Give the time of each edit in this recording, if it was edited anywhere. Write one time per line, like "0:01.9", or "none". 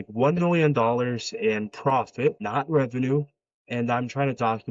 0:02.4

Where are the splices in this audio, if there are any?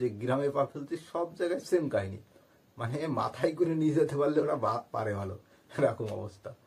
none

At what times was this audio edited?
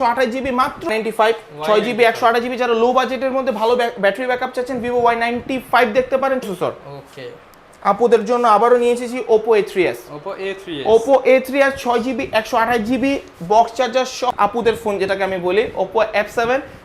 0:00.9
0:06.4
0:14.3

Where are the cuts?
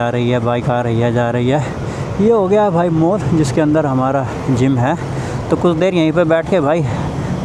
none

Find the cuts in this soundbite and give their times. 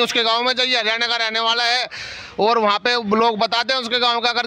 none

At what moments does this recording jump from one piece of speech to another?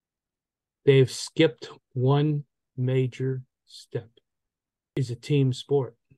0:05.0

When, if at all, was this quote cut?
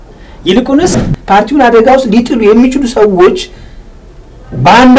0:01.1

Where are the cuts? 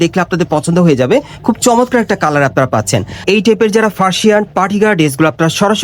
0:03.2

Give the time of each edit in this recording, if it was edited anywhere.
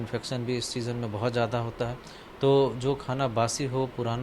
none

